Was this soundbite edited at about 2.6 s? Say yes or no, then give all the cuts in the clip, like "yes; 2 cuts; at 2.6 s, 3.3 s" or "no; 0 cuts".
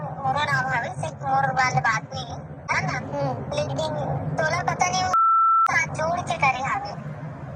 no; 0 cuts